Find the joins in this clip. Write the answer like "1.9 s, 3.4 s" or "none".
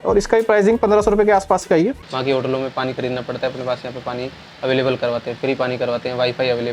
2.1 s

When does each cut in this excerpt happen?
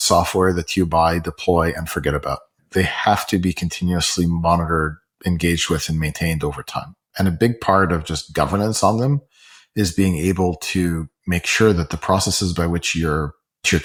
none

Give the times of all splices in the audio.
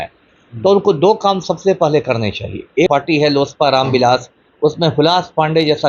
2.9 s

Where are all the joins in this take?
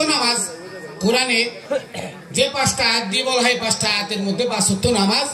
none

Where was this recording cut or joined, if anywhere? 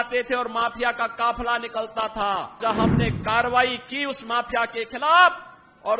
2.6 s

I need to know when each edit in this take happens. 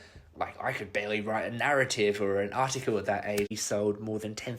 3.6 s

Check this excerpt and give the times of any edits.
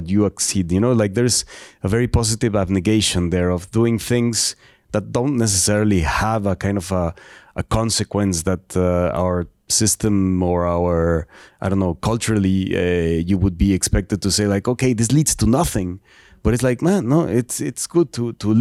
none

